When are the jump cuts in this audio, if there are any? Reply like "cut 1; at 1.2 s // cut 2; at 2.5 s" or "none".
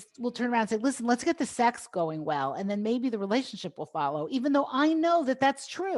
none